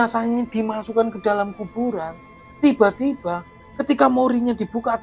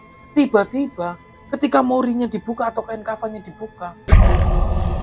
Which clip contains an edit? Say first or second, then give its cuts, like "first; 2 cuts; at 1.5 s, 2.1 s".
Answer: second; 1 cut; at 4.0 s